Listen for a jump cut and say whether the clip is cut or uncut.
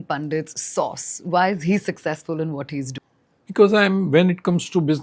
cut